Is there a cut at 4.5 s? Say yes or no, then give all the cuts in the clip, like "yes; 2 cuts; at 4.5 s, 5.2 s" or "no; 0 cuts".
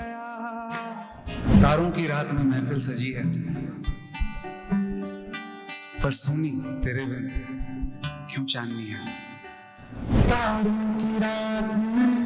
no; 2 cuts; at 1.5 s, 10.1 s